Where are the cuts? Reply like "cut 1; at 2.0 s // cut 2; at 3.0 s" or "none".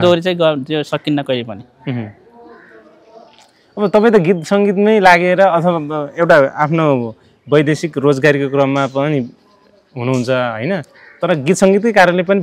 none